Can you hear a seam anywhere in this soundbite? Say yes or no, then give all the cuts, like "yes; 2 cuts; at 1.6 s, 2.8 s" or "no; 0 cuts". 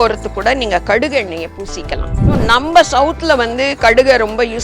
yes; 1 cut; at 2.3 s